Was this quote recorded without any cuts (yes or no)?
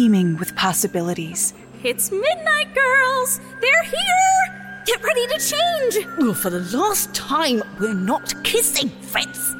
yes